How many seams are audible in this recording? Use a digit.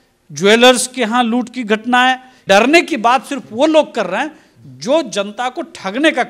1